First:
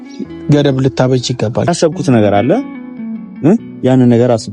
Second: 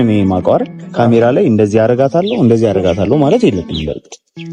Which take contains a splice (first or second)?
first